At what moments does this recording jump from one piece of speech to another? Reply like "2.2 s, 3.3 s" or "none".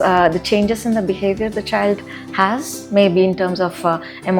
none